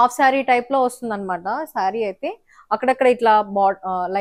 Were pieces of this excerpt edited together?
no; 0 cuts

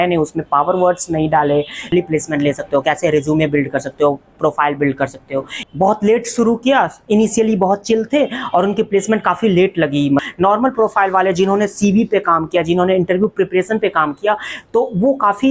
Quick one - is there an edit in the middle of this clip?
yes; 3 cuts; at 1.9 s, 5.7 s, 10.2 s

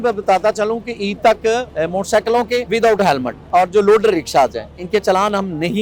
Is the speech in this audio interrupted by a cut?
yes; 3 cuts; at 1.7 s, 2.7 s, 3.3 s

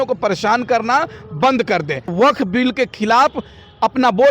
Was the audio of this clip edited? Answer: yes; 1 cut; at 2.1 s

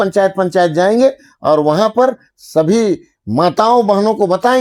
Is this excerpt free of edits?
yes; 0 cuts

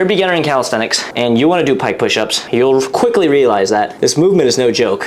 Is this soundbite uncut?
no; 2 cuts; at 1.0 s, 2.4 s

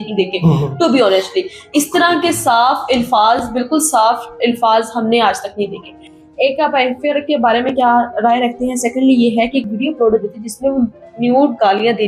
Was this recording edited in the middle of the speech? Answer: no; 0 cuts

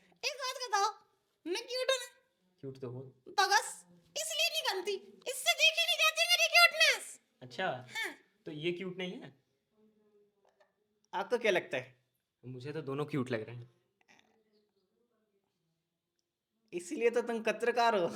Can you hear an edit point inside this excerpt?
no; 0 cuts

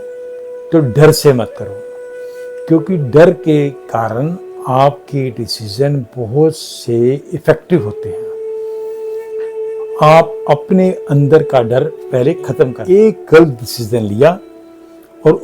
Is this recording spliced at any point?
yes; 1 cut; at 12.8 s

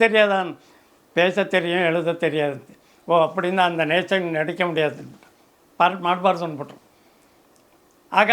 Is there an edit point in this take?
no; 0 cuts

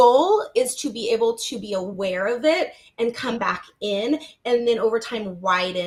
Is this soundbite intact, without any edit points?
yes; 0 cuts

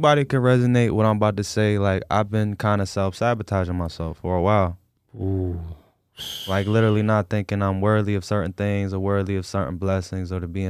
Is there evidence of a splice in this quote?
no; 0 cuts

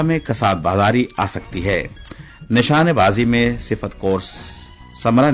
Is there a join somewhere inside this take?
no; 0 cuts

